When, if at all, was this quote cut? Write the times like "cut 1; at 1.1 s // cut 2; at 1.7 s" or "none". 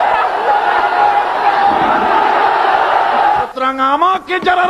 cut 1; at 3.3 s